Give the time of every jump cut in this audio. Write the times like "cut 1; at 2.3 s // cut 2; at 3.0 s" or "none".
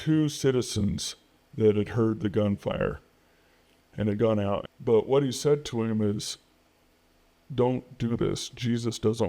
cut 1; at 4.7 s